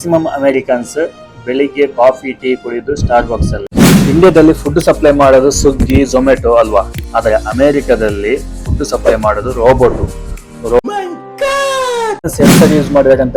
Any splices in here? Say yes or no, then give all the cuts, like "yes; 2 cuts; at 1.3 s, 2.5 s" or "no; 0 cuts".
yes; 2 cuts; at 3.7 s, 12.3 s